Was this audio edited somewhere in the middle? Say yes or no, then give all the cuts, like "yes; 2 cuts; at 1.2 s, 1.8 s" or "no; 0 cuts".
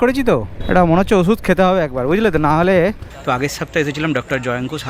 yes; 1 cut; at 3.0 s